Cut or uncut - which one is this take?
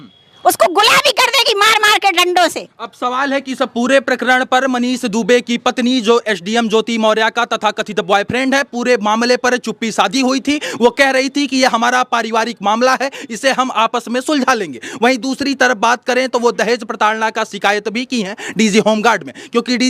uncut